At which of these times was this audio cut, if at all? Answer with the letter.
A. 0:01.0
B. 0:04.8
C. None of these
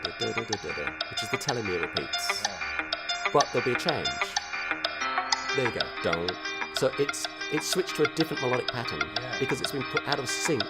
B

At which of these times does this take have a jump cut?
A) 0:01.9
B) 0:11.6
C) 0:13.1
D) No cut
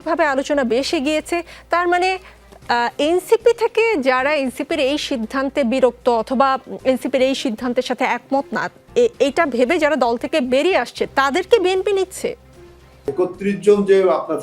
C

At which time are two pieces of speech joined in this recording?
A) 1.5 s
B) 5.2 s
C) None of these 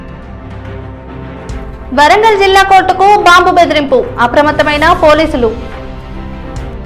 A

